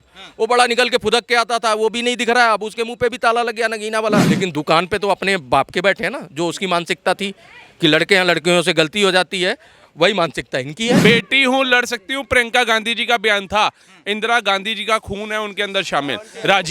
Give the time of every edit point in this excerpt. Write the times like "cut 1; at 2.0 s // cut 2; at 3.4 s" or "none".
cut 1; at 4.3 s // cut 2; at 11.0 s